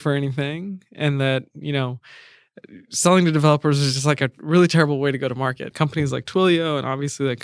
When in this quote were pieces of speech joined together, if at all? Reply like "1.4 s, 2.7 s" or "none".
5.7 s